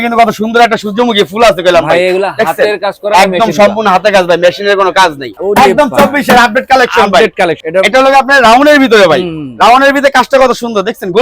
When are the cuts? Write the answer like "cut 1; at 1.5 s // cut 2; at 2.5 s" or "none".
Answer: cut 1; at 5.4 s // cut 2; at 7.6 s